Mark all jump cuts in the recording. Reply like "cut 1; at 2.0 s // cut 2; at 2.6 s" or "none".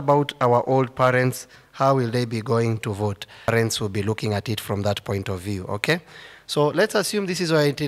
cut 1; at 3.5 s